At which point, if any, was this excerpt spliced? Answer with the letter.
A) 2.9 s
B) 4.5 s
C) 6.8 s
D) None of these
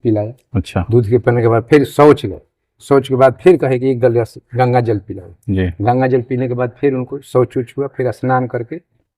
D